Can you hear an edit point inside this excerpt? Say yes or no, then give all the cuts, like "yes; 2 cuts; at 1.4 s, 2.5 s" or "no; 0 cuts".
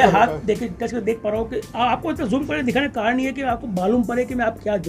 no; 0 cuts